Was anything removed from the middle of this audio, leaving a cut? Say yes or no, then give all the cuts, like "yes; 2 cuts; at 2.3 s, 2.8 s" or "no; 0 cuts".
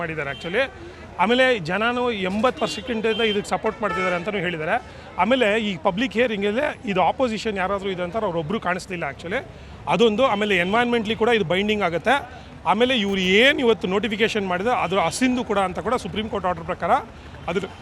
no; 0 cuts